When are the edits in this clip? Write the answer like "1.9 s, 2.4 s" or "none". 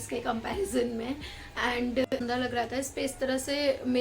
2.1 s

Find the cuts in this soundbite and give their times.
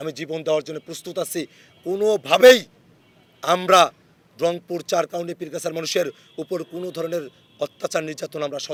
none

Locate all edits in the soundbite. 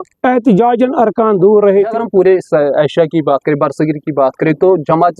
1.9 s

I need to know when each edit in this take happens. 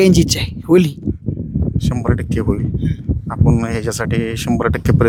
none

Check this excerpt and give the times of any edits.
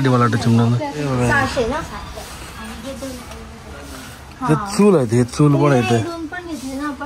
1.4 s

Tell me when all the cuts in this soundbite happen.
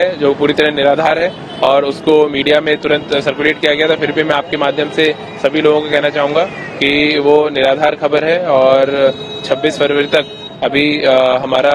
none

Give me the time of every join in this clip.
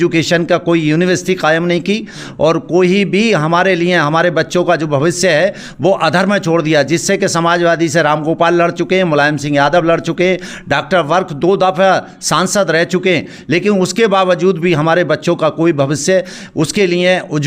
none

